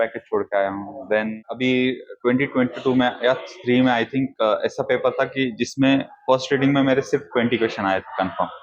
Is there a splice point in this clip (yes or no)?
yes